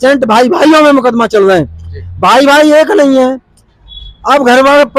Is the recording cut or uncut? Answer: uncut